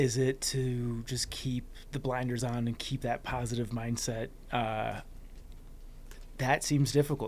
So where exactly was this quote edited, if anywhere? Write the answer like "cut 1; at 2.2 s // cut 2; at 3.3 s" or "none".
none